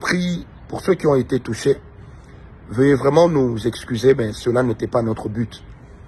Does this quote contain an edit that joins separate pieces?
no; 0 cuts

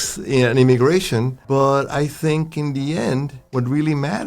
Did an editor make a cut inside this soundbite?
yes; 2 cuts; at 1.4 s, 3.4 s

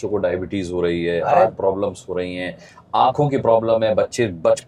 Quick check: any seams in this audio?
no; 0 cuts

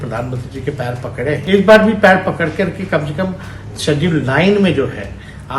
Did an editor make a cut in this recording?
yes; 1 cut; at 1.4 s

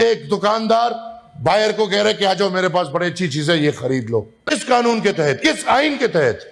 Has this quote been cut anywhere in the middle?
yes; 1 cut; at 4.5 s

